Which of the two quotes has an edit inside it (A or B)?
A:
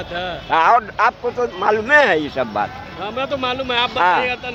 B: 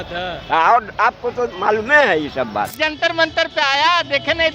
B